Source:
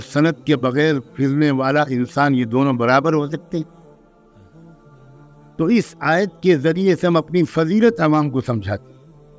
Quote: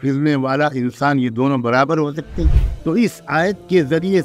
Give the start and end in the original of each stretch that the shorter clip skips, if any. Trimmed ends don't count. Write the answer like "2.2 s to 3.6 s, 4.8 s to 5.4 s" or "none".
3.8 s to 5.4 s

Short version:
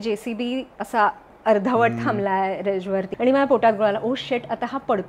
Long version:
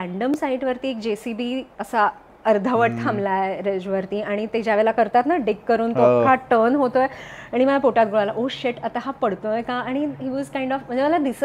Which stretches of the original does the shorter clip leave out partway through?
4.1 s to 7.4 s

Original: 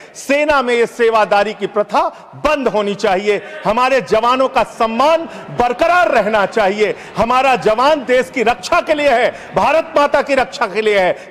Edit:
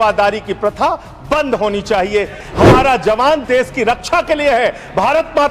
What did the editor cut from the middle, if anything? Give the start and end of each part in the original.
3.5 s to 7.0 s

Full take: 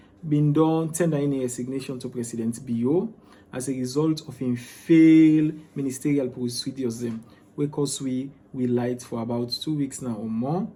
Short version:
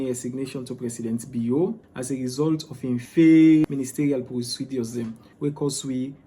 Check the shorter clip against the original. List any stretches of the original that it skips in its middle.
3.2 s to 3.5 s, 4.6 s to 4.8 s, 5.4 s to 5.7 s, 7.3 s to 7.4 s

